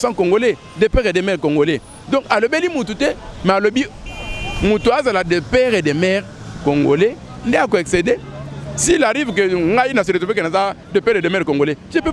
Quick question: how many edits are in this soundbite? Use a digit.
0